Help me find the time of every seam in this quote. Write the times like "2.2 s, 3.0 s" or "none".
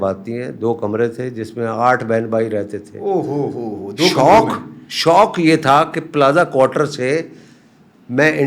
none